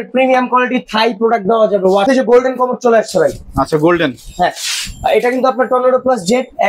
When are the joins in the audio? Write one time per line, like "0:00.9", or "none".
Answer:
0:02.1